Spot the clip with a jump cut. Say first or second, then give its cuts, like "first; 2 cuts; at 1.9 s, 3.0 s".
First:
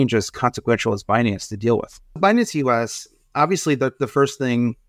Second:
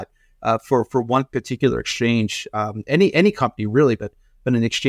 first; 1 cut; at 2.2 s